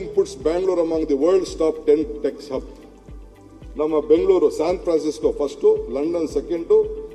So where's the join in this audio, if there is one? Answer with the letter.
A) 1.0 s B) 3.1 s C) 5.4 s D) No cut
D